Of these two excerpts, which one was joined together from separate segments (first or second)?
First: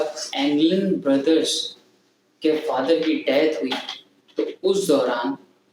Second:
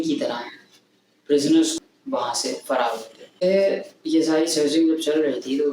second